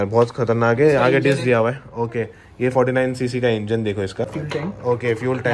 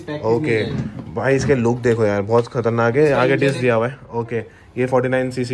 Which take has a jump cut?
first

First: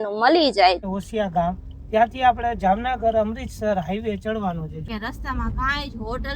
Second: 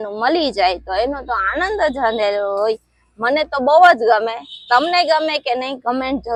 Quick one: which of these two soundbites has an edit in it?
first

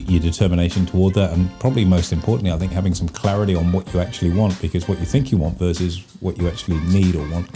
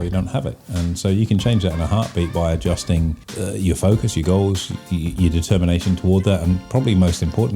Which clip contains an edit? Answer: second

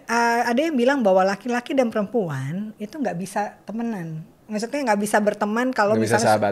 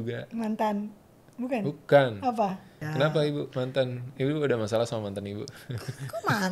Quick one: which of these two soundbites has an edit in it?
second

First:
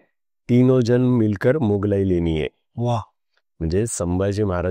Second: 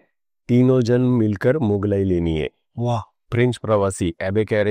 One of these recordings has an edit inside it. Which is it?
second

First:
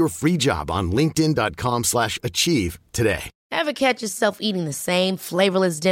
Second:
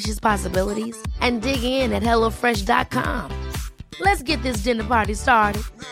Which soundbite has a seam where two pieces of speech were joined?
first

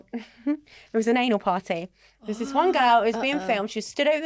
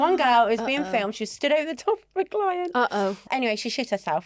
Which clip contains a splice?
second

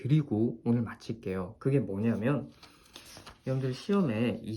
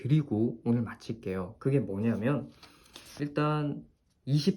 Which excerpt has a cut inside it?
second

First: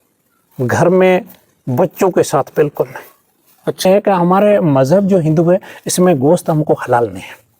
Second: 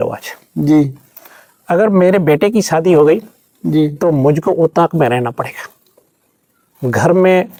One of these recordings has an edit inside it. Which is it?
first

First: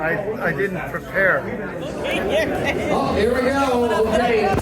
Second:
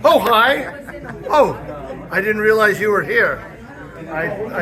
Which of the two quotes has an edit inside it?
first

